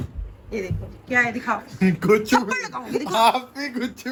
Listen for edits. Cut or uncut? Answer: uncut